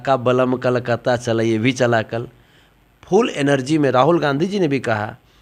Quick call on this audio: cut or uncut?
uncut